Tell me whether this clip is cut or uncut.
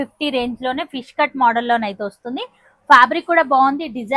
uncut